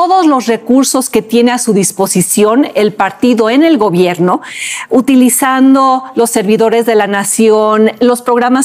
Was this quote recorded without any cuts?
yes; 0 cuts

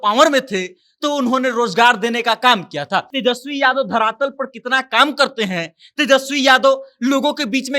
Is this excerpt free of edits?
no; 1 cut; at 3.1 s

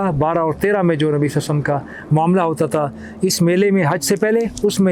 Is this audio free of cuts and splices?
yes; 0 cuts

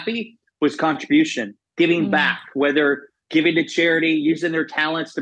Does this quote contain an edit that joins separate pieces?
no; 0 cuts

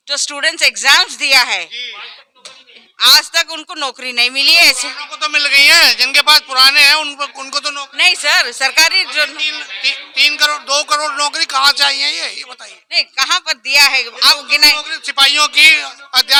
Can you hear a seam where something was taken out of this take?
no; 0 cuts

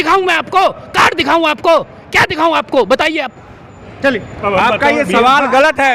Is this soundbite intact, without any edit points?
yes; 0 cuts

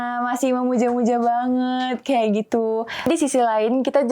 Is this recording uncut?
no; 1 cut; at 3.1 s

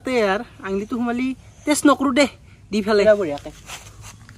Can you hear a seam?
yes; 1 cut; at 3.0 s

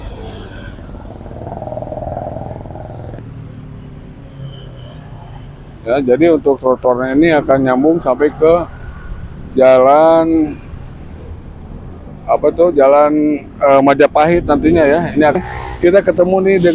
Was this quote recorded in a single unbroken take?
no; 2 cuts; at 3.2 s, 15.4 s

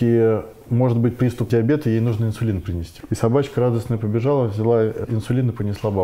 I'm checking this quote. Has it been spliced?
yes; 3 cuts; at 1.5 s, 2.9 s, 5.0 s

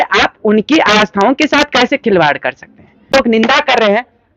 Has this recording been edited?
yes; 1 cut; at 3.1 s

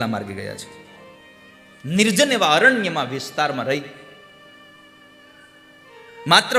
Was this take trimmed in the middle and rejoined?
no; 0 cuts

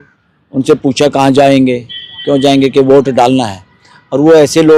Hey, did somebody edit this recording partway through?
no; 0 cuts

